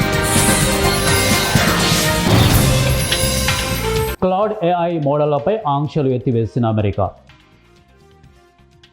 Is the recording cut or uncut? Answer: uncut